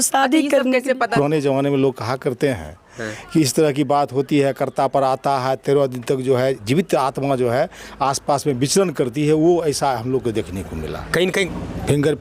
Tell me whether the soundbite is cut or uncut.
cut